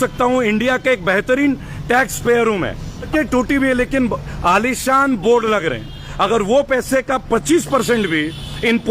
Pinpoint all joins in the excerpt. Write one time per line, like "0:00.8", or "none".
0:03.1